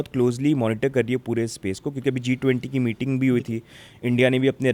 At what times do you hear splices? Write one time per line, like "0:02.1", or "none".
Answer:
none